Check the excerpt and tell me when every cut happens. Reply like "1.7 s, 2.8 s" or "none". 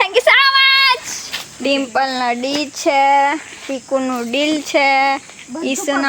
1.2 s